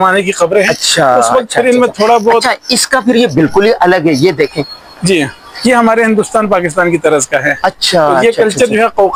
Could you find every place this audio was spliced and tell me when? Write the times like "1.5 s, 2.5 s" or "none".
none